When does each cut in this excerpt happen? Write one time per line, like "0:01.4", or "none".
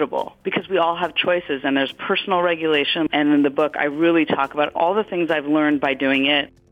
0:03.1
0:04.8